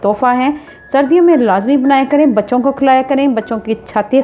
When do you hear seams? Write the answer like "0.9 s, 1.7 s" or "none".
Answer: none